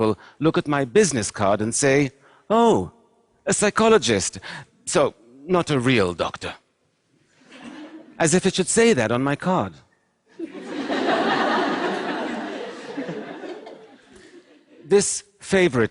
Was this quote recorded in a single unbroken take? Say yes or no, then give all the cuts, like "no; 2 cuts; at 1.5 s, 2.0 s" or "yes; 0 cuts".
no; 1 cut; at 1.9 s